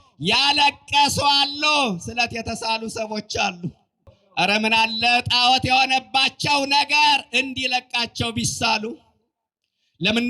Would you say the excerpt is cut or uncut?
cut